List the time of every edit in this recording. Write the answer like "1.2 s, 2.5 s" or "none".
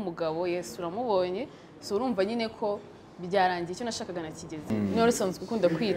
4.7 s